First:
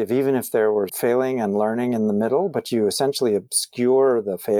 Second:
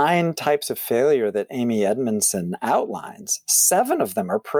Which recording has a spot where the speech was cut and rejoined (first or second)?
first